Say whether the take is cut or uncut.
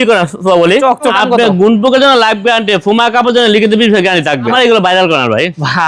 cut